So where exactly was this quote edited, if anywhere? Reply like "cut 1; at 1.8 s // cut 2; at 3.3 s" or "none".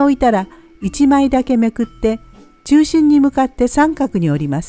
none